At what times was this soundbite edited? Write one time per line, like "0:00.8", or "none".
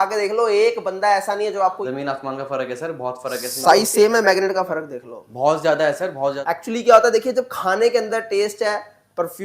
0:01.8
0:06.4